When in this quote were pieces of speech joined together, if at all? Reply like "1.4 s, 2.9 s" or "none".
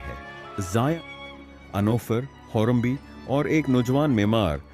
0.9 s